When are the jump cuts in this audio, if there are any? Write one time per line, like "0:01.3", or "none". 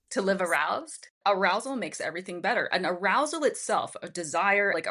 0:01.0